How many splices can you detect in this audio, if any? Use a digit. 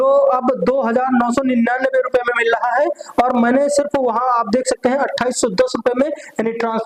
0